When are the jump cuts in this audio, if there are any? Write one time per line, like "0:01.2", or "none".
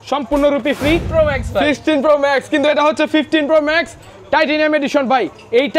0:01.1